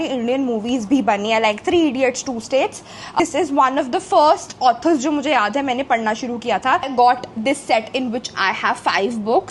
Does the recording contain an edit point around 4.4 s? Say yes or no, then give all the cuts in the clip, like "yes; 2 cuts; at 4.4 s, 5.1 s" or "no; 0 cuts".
no; 2 cuts; at 3.2 s, 6.9 s